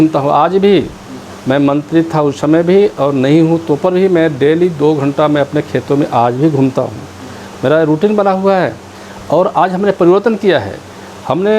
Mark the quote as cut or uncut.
uncut